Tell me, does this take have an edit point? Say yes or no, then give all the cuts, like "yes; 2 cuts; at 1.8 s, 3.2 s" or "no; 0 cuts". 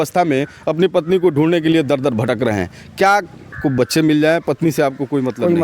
yes; 1 cut; at 3.5 s